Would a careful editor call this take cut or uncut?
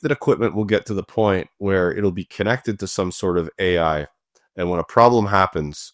uncut